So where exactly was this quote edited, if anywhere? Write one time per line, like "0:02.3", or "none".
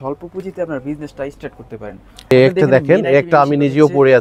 0:02.3